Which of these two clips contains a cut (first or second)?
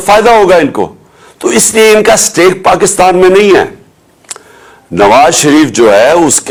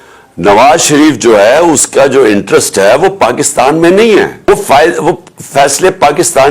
second